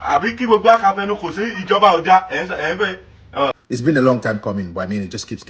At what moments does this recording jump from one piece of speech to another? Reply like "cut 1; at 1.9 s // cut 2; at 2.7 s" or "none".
cut 1; at 3.5 s